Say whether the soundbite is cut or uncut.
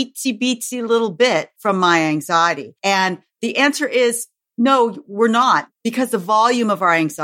cut